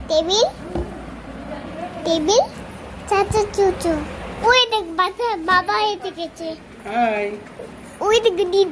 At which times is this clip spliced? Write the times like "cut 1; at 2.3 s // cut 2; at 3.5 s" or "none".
cut 1; at 2.6 s // cut 2; at 4.2 s